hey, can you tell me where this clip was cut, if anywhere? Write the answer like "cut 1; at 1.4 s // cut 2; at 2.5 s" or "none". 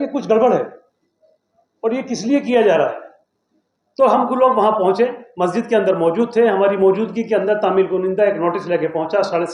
none